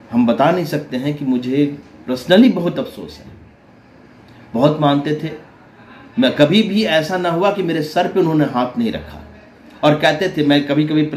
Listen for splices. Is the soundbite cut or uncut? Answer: uncut